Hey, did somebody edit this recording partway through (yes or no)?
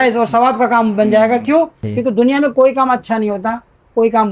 yes